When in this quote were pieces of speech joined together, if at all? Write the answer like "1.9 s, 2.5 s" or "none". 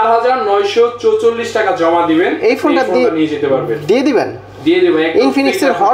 none

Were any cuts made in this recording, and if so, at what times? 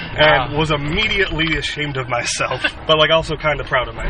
2.7 s

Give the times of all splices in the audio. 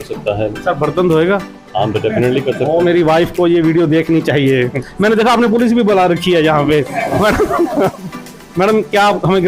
4.9 s

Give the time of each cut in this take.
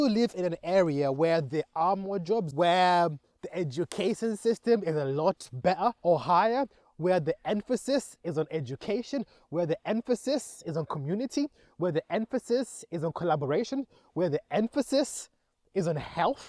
2.5 s, 6.0 s

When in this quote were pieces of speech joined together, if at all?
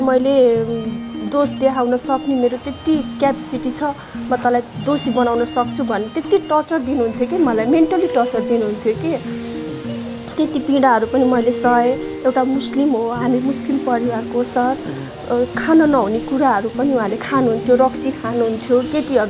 none

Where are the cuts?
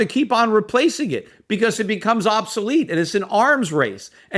none

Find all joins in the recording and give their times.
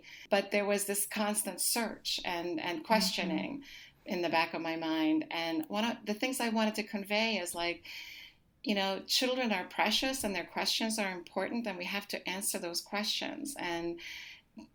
none

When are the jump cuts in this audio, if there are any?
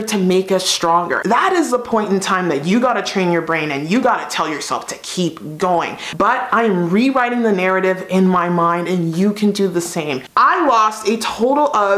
1.2 s, 6.0 s, 10.2 s

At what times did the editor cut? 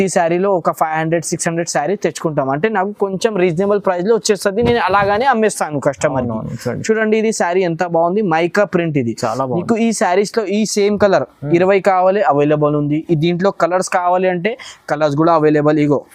none

